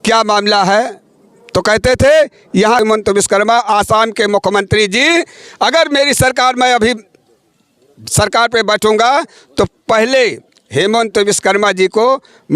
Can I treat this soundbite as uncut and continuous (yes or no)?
no